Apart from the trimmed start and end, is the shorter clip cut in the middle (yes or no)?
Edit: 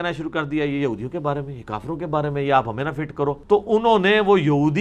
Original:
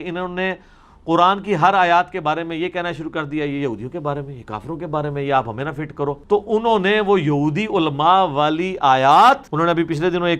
no